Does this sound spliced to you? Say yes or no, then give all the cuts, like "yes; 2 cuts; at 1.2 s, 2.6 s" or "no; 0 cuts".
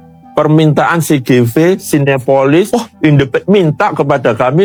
no; 0 cuts